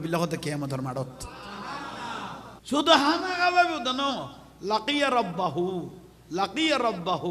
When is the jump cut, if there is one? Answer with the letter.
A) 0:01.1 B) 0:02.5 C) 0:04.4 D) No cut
B